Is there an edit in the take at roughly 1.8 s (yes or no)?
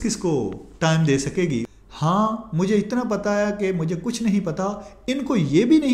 yes